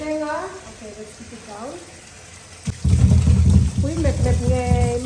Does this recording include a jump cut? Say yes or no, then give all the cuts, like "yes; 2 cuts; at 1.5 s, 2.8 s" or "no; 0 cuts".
yes; 1 cut; at 2.7 s